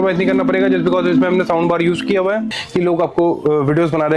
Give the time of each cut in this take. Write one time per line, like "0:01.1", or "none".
0:02.5